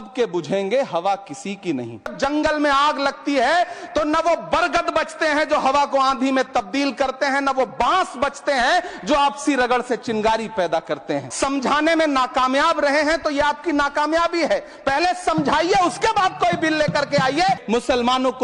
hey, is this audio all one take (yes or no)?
no